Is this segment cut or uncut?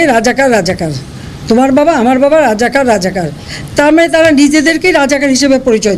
uncut